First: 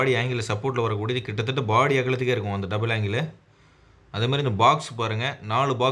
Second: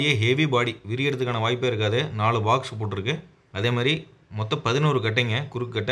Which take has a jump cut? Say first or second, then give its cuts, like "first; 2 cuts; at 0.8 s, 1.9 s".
second; 1 cut; at 3.4 s